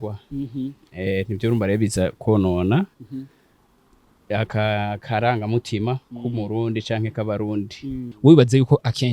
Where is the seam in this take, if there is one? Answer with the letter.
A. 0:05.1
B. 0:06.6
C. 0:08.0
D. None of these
C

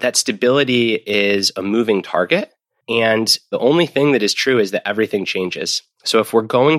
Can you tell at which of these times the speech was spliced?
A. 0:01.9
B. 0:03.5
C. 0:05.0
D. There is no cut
B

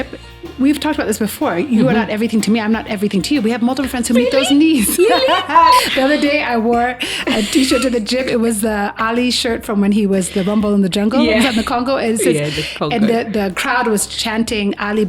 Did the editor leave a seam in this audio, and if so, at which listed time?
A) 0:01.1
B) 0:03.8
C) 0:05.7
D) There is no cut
C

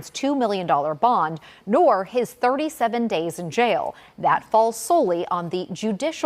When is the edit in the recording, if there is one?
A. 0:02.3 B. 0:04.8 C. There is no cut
C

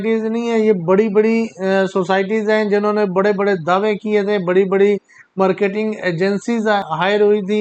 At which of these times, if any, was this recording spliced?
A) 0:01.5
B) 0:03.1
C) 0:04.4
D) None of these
D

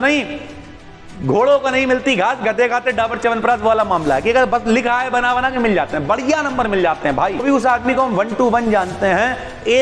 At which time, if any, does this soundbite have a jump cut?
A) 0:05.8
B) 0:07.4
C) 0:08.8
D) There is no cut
B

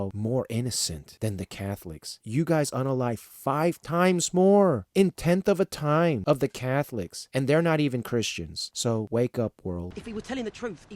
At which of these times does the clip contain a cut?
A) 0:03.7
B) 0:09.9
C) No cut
B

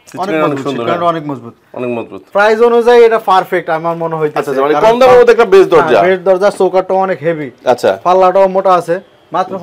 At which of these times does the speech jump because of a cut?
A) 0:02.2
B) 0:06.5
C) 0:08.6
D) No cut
A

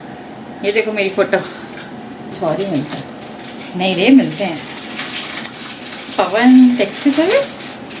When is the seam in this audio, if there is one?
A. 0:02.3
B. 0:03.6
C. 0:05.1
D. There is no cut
A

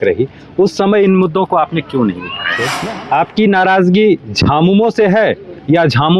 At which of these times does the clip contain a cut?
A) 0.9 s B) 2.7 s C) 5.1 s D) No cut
B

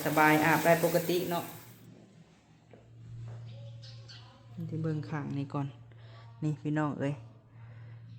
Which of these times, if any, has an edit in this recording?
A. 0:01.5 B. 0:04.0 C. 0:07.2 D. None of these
A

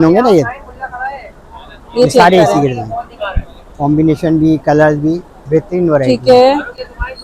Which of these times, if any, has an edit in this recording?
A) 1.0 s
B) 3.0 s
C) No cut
C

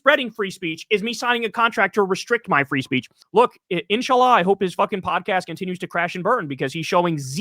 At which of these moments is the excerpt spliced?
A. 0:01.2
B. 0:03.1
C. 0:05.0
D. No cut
B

